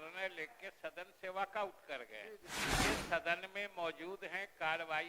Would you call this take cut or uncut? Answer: cut